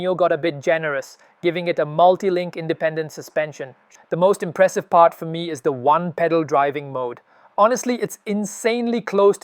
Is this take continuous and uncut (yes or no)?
no